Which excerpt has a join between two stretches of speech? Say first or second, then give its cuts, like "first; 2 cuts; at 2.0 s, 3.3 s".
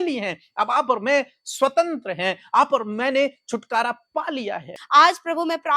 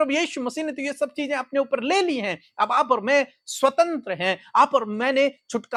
first; 1 cut; at 4.7 s